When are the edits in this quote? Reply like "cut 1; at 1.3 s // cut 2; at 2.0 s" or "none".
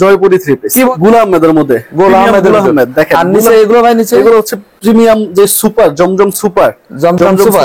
cut 1; at 0.9 s